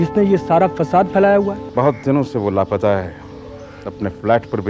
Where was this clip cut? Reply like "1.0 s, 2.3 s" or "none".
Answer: 1.6 s